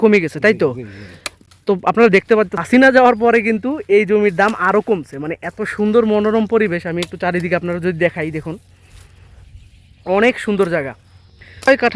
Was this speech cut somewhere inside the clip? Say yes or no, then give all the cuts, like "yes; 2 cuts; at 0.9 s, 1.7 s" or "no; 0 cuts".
no; 0 cuts